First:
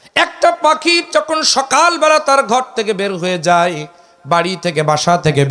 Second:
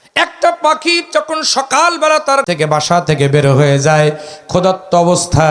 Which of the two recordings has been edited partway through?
second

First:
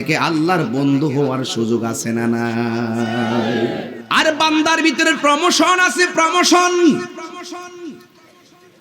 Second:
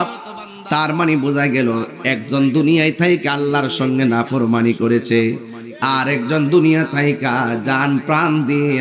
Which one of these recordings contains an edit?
first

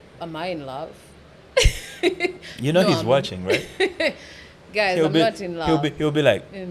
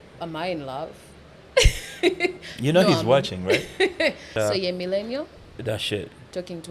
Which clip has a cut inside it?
second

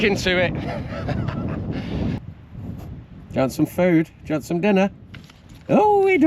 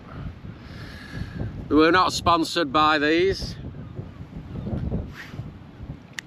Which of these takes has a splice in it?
first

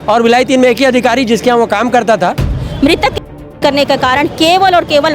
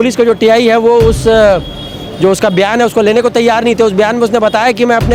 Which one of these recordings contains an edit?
first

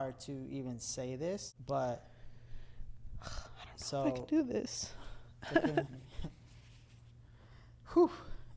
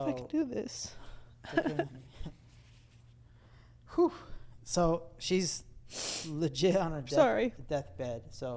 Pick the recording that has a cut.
first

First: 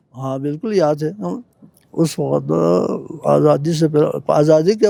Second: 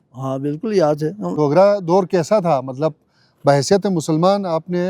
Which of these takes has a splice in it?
second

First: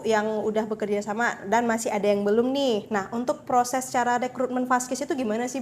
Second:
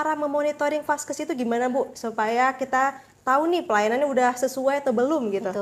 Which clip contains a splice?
first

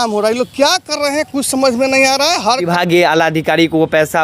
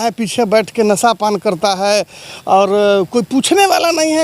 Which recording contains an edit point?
first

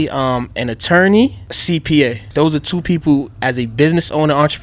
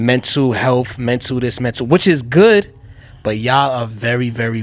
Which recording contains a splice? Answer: first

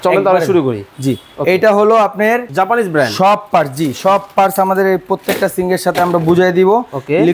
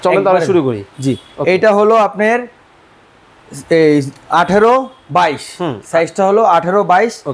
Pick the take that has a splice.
first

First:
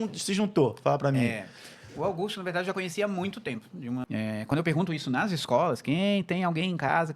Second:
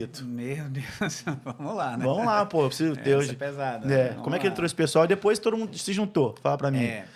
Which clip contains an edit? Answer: first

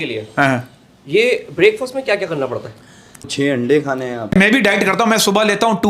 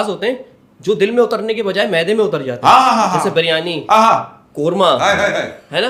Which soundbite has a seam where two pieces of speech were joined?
first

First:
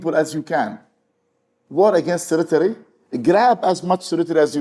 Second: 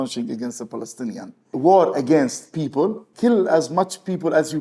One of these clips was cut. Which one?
second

